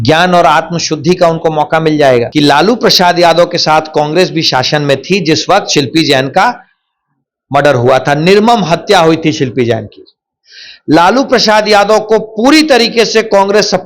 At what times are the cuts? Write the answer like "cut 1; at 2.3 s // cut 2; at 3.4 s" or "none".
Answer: cut 1; at 2.3 s